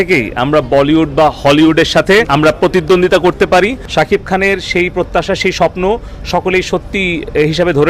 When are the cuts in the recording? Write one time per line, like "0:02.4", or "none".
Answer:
0:02.3
0:03.8